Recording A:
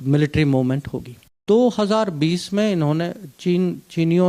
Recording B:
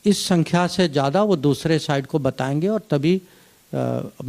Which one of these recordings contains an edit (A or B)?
A